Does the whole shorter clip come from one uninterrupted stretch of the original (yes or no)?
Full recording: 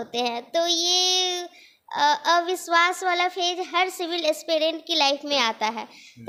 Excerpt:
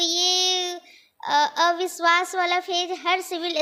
yes